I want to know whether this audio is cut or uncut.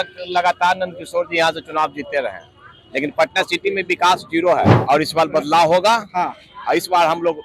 cut